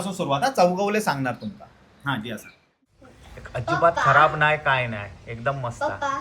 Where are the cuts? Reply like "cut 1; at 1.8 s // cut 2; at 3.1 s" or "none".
cut 1; at 2.7 s